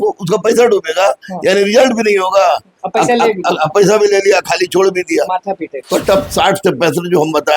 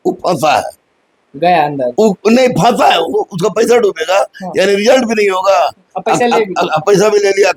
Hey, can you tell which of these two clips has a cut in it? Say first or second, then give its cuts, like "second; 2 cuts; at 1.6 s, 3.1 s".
first; 1 cut; at 5.8 s